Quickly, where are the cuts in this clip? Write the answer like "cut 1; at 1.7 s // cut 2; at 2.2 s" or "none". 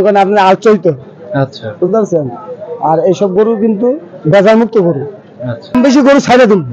cut 1; at 5.7 s